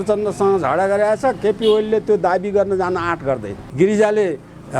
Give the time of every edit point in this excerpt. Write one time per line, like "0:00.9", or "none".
0:03.6